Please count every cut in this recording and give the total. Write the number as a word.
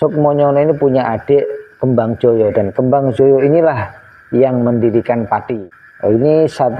one